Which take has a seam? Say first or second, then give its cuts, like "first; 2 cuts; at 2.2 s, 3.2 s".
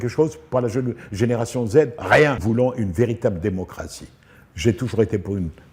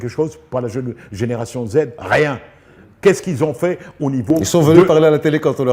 first; 1 cut; at 2.4 s